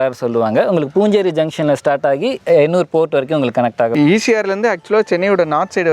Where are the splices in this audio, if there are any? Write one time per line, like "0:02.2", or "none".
none